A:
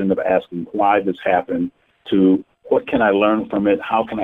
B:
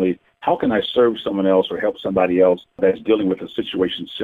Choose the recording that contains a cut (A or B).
B